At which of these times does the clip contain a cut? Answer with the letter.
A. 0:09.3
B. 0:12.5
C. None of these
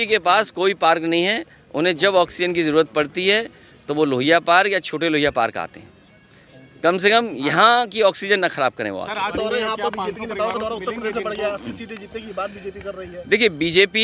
A